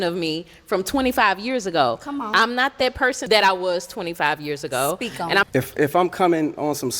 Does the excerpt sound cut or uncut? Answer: cut